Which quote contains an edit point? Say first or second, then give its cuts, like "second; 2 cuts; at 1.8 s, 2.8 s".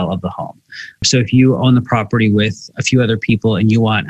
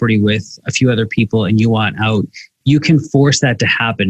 first; 1 cut; at 1.0 s